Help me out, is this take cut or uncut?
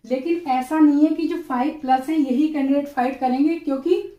uncut